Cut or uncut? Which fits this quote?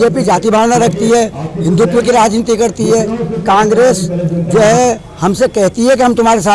uncut